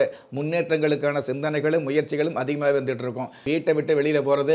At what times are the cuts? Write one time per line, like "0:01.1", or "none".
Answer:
0:03.4